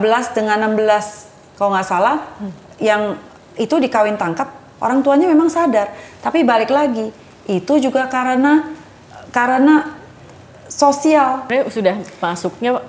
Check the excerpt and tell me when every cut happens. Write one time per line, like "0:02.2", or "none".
0:11.5

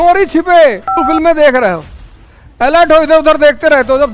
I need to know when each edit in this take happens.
0:00.9

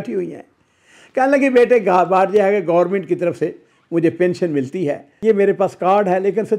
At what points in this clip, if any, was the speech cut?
0:05.1

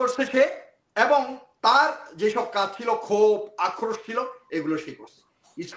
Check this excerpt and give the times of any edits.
none

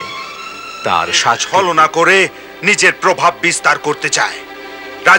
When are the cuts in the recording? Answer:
0:01.4

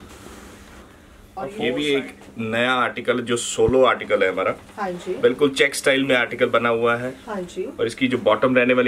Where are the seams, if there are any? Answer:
0:01.7

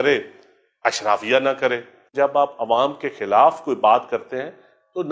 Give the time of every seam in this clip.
0:02.1

